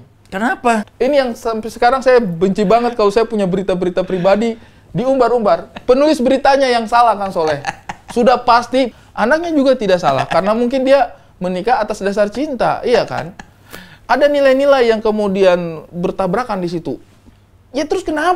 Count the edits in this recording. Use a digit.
2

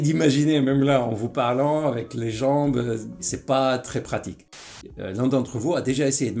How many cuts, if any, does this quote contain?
2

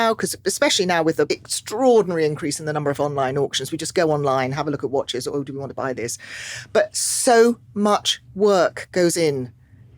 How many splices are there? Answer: 1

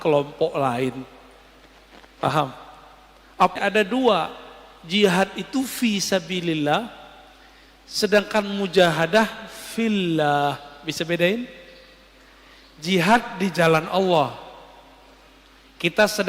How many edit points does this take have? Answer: 1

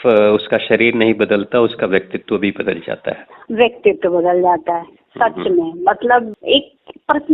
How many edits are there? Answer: 1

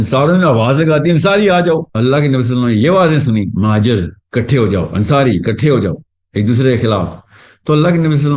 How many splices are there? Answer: 0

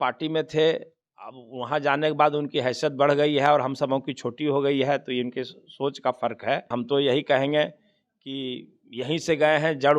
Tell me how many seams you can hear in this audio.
1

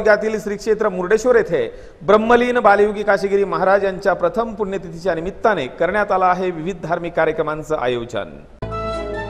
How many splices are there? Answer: 0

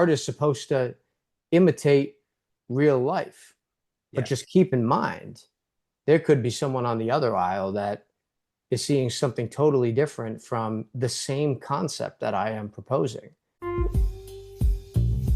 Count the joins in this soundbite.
1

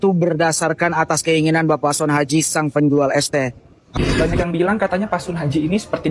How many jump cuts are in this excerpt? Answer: 1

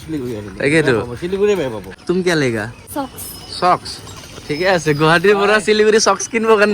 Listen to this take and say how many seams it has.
2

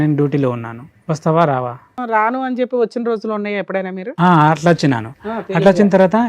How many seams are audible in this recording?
1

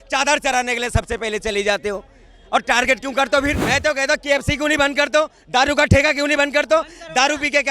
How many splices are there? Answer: 1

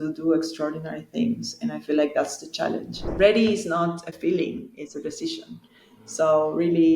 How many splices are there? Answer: 1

